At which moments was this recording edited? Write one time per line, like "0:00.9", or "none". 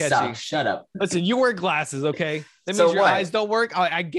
0:00.9